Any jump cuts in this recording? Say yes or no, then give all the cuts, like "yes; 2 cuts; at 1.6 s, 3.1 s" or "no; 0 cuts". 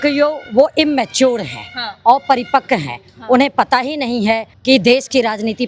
yes; 1 cut; at 4.5 s